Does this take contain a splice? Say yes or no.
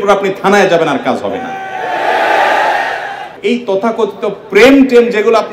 yes